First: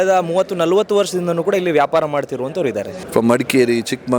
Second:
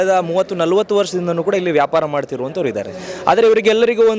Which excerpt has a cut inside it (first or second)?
first